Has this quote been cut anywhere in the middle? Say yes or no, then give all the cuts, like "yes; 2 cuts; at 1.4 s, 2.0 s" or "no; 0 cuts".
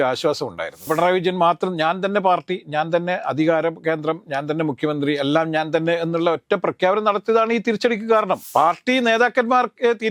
yes; 2 cuts; at 0.9 s, 8.4 s